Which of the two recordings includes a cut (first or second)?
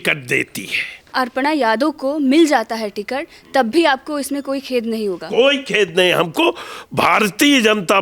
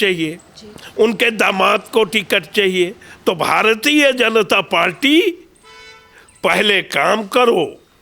first